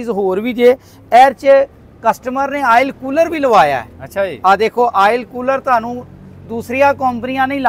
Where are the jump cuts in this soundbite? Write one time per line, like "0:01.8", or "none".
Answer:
none